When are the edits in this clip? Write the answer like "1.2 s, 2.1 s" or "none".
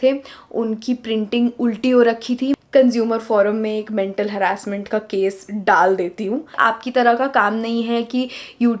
2.6 s, 6.5 s

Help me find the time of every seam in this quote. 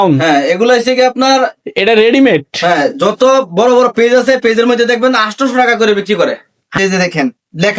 6.8 s

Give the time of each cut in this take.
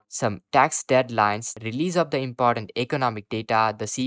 1.5 s

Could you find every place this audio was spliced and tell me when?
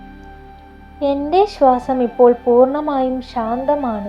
1.0 s

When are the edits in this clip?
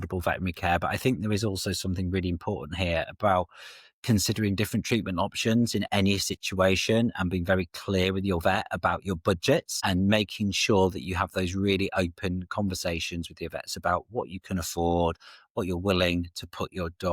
9.7 s

